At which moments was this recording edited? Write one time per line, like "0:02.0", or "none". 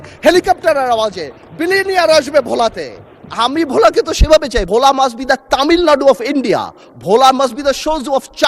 0:04.6